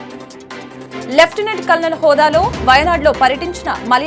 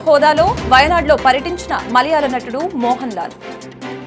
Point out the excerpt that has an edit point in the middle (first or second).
first